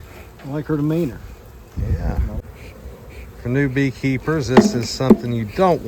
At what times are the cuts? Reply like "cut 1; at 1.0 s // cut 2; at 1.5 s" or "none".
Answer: cut 1; at 2.4 s

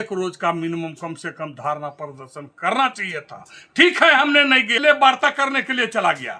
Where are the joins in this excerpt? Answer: cut 1; at 4.8 s

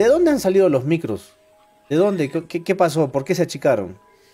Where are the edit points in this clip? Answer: none

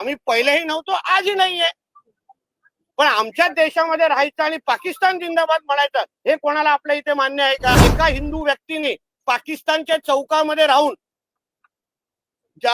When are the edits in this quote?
cut 1; at 7.8 s

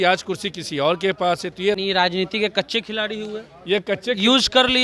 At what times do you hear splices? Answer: cut 1; at 1.8 s

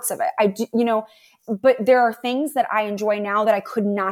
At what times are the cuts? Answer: none

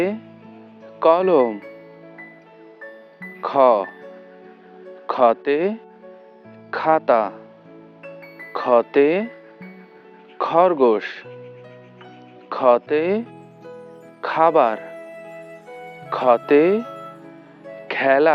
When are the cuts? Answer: cut 1; at 14.8 s // cut 2; at 16.1 s

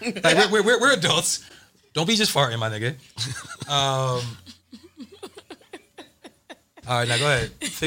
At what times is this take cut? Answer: none

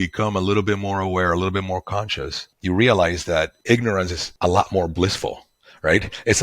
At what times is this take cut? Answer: cut 1; at 4.2 s

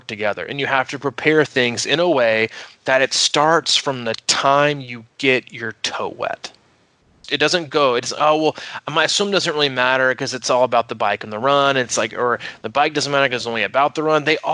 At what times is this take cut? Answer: cut 1; at 7.2 s

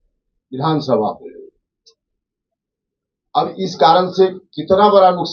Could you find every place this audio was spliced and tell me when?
none

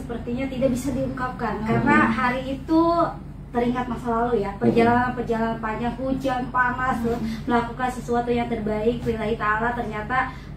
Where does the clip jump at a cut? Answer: none

